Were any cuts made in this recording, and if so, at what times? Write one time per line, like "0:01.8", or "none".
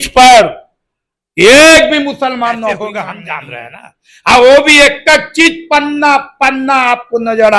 0:03.3

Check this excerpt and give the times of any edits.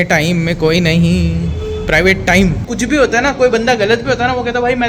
0:02.6

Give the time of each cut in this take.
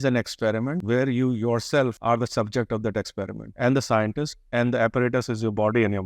0:00.8
0:02.0
0:03.4

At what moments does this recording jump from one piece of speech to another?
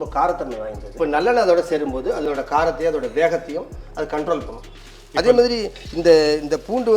0:00.9
0:04.7

